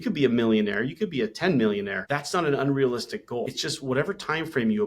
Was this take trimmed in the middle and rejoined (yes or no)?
yes